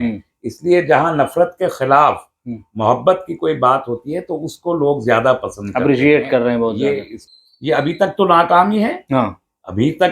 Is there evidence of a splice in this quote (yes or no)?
yes